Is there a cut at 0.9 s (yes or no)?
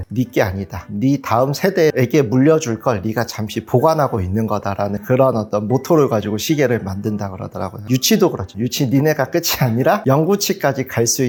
no